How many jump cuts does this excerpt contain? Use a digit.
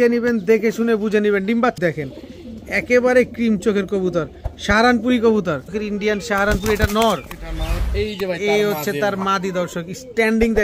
2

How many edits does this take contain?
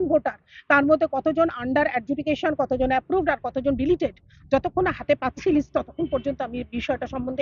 0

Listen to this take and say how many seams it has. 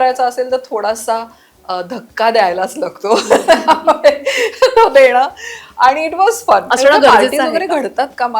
1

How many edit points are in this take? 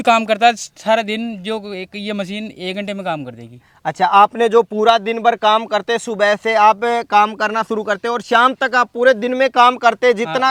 0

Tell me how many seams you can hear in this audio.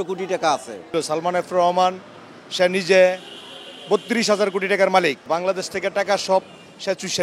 2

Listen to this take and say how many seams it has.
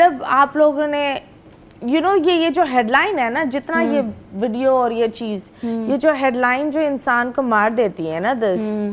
0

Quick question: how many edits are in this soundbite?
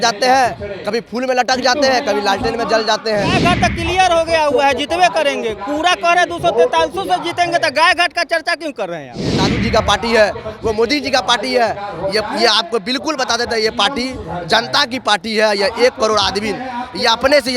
2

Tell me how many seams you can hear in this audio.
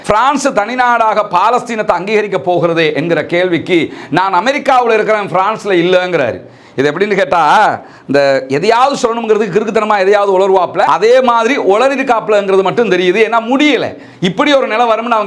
0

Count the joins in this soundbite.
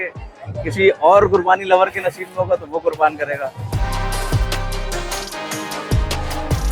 1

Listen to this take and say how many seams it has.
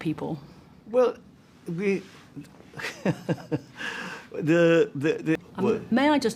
1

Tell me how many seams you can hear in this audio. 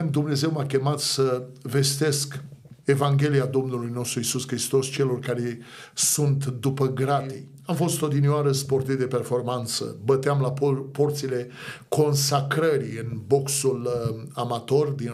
1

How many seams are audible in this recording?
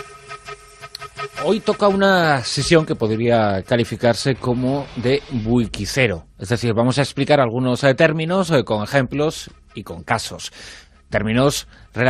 0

